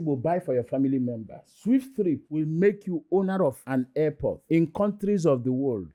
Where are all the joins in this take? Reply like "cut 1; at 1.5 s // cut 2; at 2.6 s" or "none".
none